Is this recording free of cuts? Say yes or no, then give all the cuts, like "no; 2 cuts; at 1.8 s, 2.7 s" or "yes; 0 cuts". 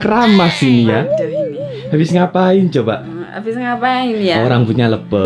yes; 0 cuts